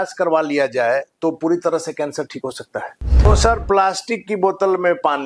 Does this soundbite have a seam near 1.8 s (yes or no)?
no